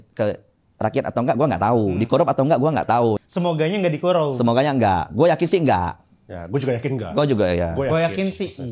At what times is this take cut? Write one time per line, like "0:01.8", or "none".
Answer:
0:03.2